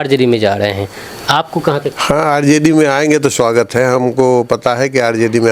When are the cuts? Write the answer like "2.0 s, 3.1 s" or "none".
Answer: 1.9 s